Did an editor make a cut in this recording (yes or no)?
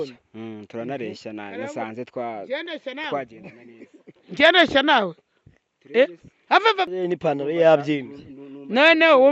yes